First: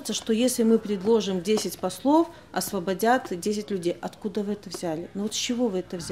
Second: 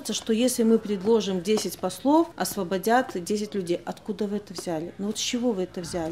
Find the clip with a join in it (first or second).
second